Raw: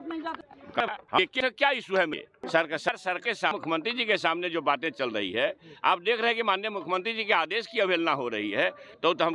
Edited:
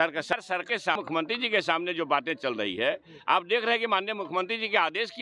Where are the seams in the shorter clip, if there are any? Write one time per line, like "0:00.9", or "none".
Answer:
none